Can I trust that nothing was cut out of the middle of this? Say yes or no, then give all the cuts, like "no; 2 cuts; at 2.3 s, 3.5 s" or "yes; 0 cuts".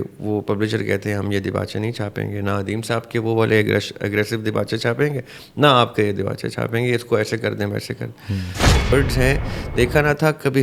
no; 1 cut; at 8.9 s